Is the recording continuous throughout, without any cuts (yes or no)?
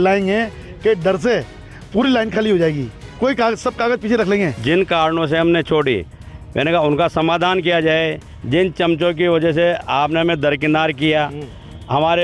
no